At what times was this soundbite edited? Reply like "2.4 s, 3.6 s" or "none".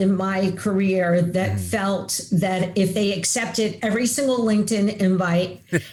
none

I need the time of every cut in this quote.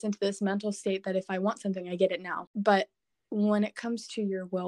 2.5 s

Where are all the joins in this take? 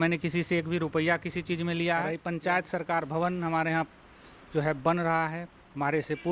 2.2 s

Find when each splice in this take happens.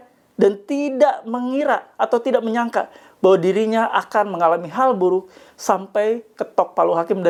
none

